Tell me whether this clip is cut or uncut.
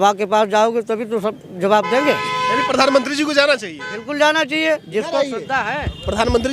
uncut